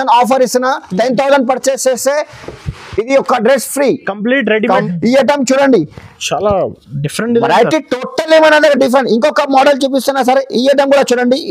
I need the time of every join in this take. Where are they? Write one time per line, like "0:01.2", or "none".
0:04.8